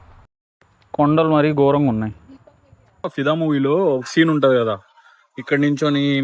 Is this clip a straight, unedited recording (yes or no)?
no